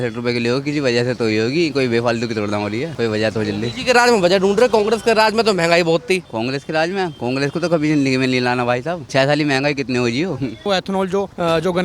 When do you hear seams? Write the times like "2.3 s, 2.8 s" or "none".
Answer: 10.7 s